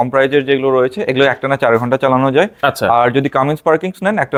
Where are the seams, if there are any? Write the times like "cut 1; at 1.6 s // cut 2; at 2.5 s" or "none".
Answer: none